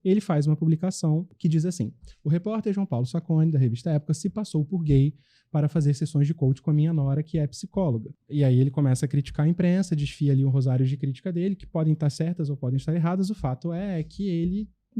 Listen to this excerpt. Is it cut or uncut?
cut